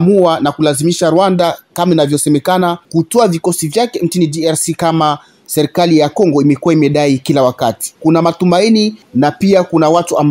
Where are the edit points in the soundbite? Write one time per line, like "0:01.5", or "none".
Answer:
0:02.8
0:07.9
0:09.0